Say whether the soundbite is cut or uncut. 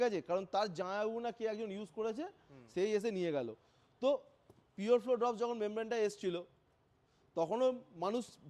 uncut